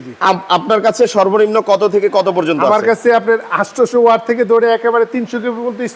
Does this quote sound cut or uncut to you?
uncut